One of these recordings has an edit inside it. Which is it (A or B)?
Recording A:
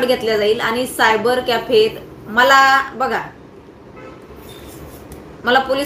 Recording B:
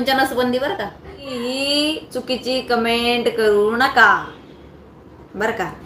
B